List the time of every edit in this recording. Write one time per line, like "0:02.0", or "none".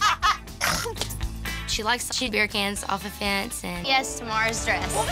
0:03.8